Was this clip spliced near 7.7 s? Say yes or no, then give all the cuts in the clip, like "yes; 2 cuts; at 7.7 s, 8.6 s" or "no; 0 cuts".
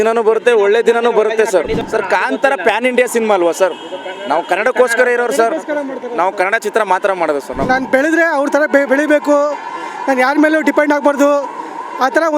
yes; 2 cuts; at 1.8 s, 7.7 s